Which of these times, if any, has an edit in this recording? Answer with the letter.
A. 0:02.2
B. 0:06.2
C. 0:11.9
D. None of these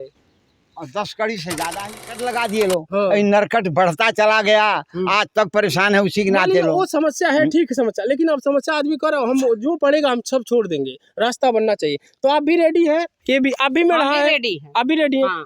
A